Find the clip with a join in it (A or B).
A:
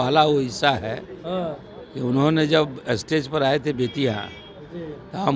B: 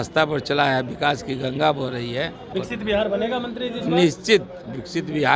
B